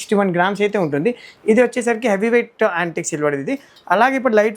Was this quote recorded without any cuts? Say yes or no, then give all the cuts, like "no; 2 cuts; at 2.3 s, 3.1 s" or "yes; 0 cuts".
no; 1 cut; at 1.3 s